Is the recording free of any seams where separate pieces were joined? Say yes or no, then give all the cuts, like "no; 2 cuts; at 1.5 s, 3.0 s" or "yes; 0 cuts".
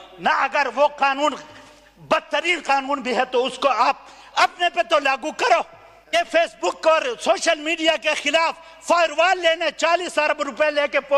no; 1 cut; at 6.1 s